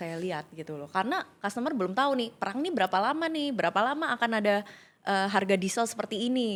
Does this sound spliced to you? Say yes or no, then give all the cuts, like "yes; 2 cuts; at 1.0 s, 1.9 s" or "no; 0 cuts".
no; 0 cuts